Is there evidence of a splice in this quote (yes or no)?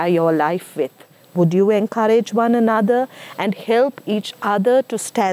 no